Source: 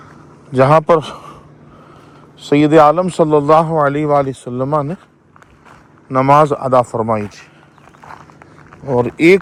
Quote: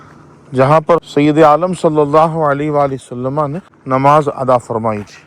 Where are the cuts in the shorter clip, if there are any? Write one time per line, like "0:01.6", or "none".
0:01.1
0:03.7